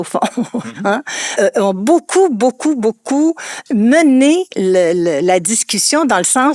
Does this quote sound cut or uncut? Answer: cut